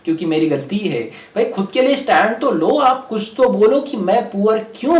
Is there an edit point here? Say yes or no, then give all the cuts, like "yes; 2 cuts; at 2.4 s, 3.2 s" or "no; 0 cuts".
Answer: no; 0 cuts